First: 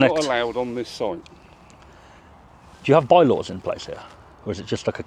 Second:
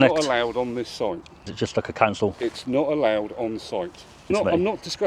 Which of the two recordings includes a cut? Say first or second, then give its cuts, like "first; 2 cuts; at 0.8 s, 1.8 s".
second; 2 cuts; at 1.5 s, 4.3 s